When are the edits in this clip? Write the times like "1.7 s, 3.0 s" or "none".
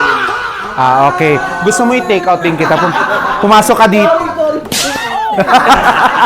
4.7 s